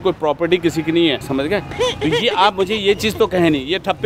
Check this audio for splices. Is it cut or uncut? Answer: cut